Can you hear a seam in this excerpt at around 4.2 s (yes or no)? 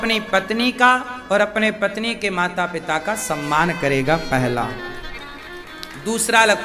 no